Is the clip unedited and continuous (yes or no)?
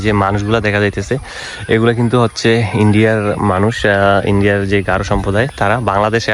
yes